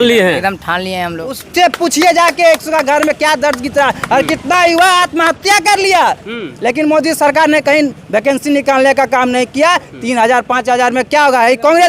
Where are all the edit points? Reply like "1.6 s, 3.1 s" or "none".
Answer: 1.4 s